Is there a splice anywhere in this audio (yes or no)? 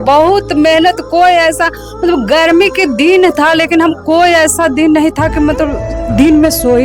no